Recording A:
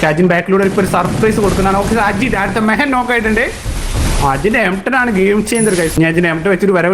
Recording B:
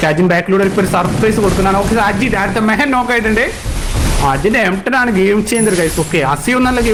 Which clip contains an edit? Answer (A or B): A